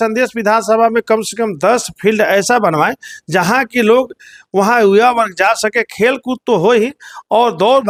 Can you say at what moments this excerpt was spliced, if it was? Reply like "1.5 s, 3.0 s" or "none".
none